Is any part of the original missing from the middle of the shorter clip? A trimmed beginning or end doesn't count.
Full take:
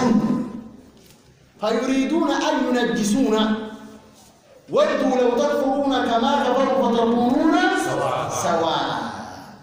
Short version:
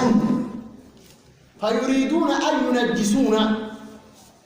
no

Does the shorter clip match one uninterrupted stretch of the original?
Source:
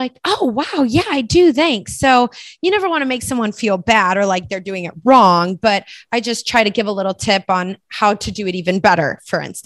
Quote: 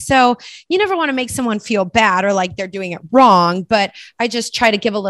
yes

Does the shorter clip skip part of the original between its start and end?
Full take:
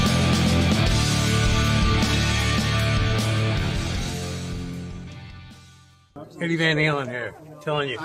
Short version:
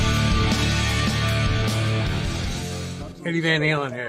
yes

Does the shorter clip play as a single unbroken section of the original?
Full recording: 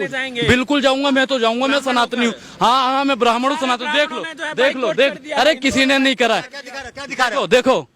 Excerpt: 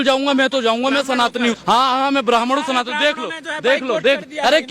no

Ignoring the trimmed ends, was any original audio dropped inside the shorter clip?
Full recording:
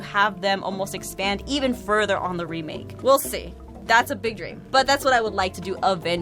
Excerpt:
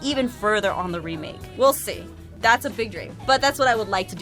no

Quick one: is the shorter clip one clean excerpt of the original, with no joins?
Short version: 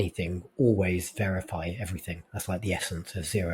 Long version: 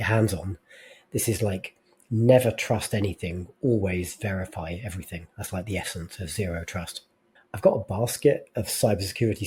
yes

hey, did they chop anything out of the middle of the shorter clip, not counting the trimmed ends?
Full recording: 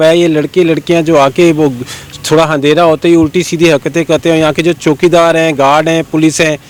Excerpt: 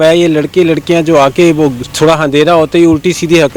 yes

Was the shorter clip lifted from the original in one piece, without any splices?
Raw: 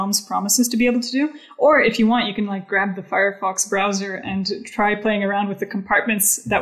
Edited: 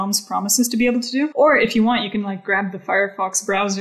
no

